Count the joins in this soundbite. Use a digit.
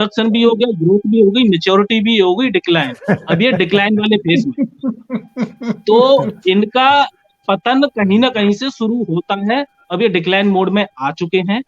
0